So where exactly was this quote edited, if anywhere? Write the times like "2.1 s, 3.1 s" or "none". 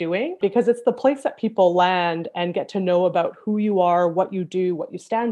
none